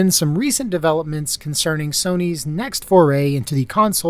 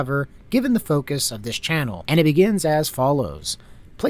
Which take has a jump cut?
second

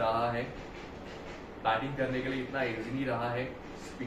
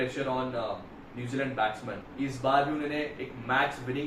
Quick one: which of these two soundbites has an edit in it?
second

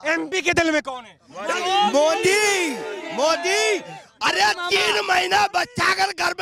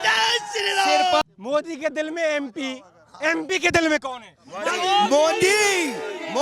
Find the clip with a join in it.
second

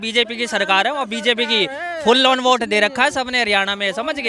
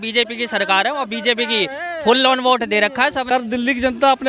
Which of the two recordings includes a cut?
second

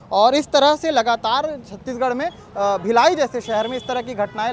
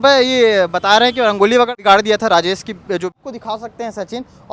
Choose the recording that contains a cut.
second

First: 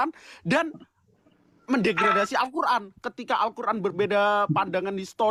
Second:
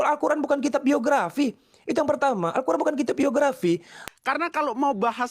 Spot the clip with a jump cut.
second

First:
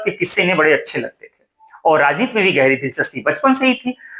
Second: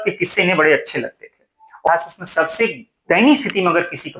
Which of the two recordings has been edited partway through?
second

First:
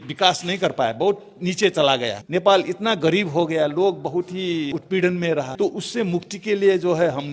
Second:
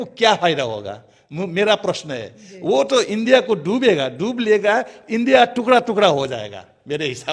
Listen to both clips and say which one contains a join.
first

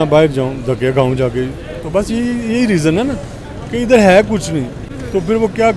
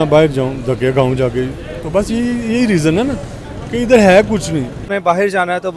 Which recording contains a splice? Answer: second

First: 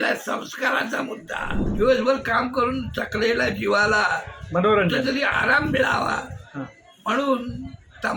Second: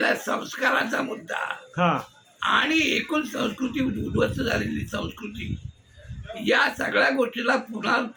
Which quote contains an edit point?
first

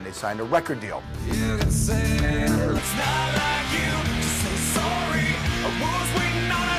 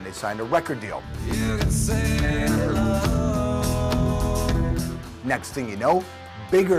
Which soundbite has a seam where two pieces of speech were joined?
second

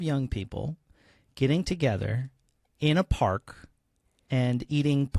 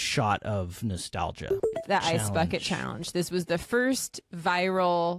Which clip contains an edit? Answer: second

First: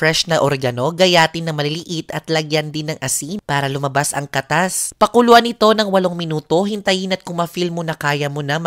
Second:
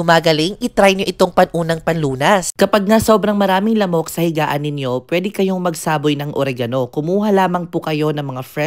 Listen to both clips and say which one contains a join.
second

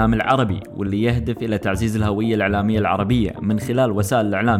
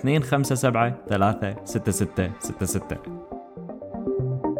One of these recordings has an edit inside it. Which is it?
second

